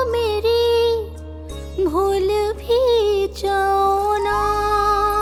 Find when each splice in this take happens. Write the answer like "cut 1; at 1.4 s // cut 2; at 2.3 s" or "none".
none